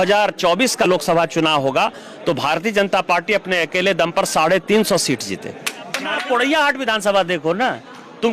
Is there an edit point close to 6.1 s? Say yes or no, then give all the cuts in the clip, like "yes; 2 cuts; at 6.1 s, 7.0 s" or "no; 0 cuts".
yes; 1 cut; at 6.1 s